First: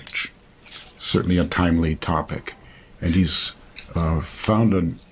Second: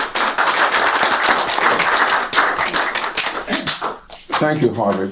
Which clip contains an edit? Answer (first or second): second